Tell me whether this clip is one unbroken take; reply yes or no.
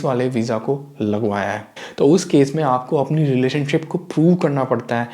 no